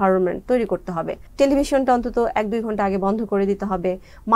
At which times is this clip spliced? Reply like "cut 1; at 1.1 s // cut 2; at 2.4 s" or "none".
cut 1; at 1.3 s